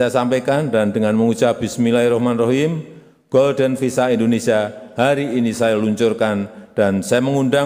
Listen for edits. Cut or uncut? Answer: uncut